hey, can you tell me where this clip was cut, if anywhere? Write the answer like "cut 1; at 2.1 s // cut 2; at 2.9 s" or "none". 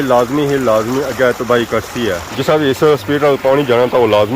cut 1; at 2.3 s